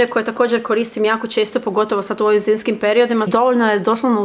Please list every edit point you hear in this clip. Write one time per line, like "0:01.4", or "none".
0:03.3